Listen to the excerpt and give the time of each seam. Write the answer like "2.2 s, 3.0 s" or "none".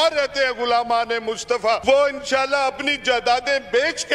1.8 s